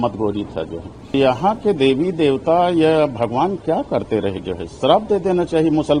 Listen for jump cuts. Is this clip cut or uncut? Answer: cut